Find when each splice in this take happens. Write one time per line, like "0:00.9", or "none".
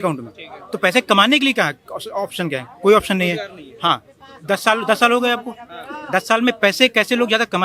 none